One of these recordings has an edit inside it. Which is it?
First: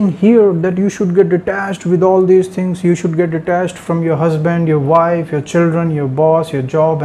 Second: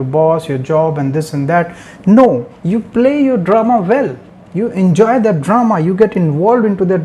second; 1 cut; at 2.5 s

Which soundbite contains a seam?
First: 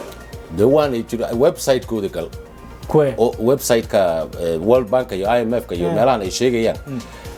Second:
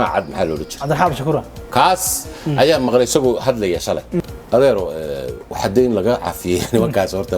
second; 1 cut; at 4.2 s

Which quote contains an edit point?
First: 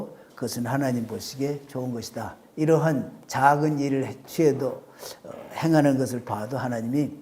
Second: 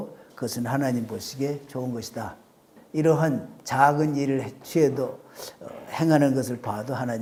first; 1 cut; at 2.4 s

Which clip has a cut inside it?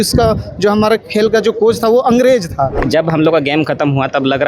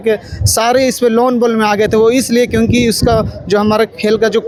first; 1 cut; at 2.8 s

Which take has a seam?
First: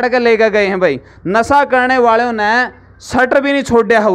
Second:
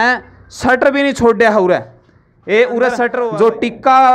second; 1 cut; at 3.2 s

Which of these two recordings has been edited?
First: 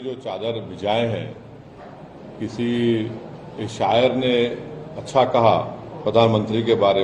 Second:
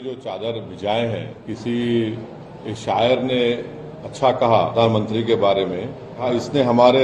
second; 3 cuts; at 1.4 s, 4.7 s, 6.2 s

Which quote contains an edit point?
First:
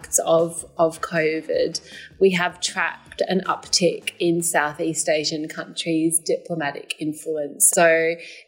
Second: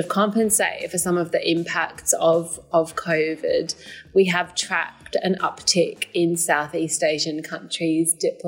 first; 1 cut; at 7.6 s

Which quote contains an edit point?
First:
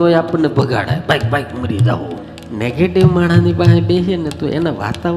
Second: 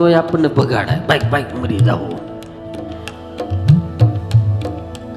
first; 1 cut; at 2.4 s

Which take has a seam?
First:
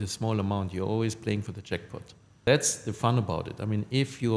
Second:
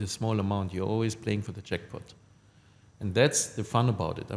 first; 1 cut; at 2.5 s

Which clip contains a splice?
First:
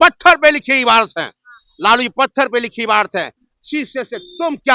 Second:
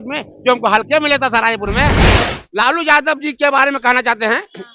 second; 1 cut; at 2.0 s

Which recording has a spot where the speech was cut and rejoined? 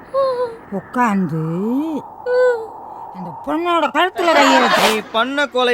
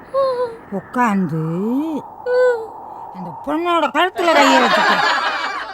first; 1 cut; at 4.8 s

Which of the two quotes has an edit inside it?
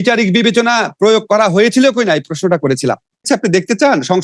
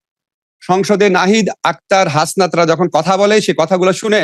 first; 1 cut; at 3.2 s

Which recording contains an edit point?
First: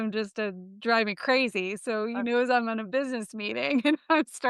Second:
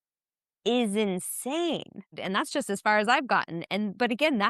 second; 1 cut; at 2.2 s

